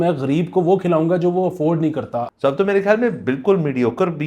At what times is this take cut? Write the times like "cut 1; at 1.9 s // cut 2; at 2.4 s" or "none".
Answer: cut 1; at 2.3 s